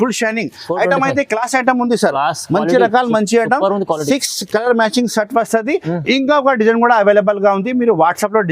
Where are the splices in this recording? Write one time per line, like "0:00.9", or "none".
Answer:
none